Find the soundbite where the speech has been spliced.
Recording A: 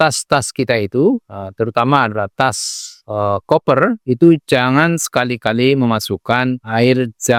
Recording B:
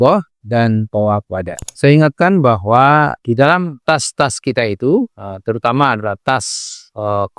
B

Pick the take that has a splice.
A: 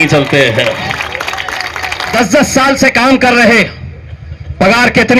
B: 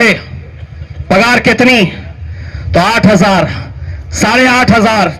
A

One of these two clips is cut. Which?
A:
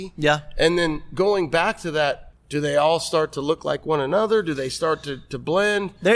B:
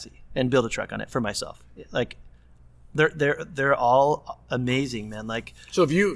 A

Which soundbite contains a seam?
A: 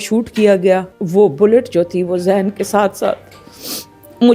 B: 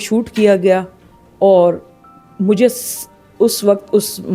A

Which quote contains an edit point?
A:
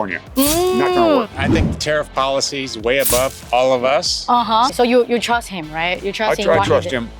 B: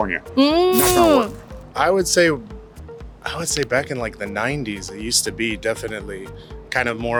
A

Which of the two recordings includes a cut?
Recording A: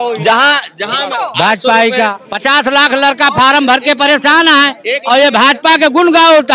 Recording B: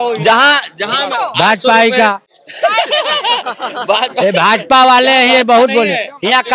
A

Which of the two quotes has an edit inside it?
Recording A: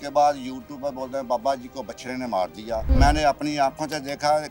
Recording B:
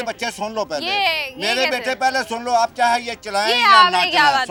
A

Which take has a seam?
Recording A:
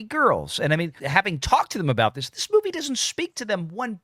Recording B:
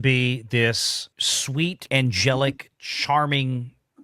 B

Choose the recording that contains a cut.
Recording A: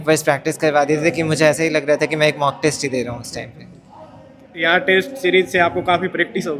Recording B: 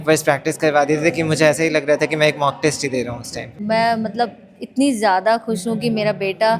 B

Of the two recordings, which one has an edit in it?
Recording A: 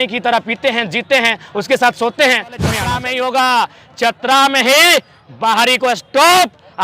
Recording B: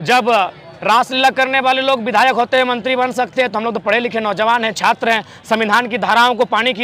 A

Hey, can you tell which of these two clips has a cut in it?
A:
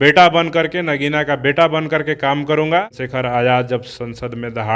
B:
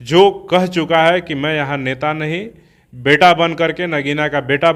A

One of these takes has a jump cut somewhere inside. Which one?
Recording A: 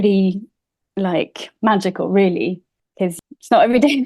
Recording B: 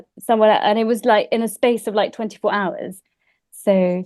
A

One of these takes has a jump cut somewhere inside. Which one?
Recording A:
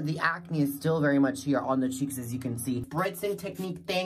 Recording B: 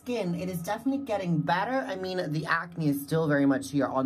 A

